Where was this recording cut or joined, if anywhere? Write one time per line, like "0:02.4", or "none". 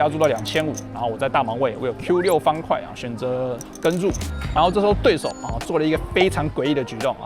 0:04.3